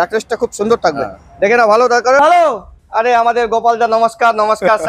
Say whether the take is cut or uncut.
cut